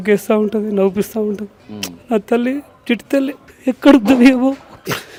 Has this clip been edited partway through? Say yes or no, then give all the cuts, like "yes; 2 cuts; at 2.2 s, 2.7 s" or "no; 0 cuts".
no; 0 cuts